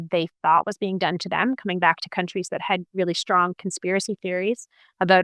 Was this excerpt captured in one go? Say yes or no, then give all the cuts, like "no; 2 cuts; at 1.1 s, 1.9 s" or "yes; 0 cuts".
yes; 0 cuts